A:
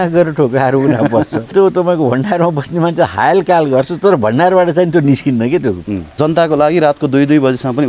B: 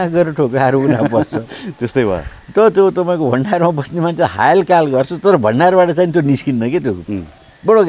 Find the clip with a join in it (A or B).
A